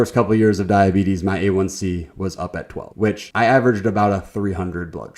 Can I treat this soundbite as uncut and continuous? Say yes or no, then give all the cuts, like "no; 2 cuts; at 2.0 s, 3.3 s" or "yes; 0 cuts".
no; 1 cut; at 3.3 s